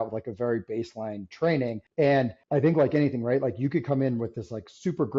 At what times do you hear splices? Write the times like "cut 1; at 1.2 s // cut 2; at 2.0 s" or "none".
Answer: cut 1; at 1.8 s // cut 2; at 2.4 s